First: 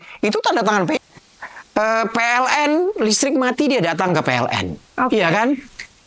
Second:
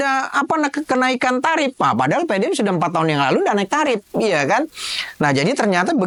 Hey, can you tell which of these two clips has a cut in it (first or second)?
first